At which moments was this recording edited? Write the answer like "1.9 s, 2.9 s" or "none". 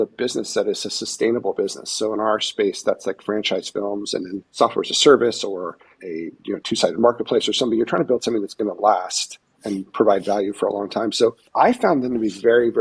4.5 s, 5.9 s, 9.6 s, 11.4 s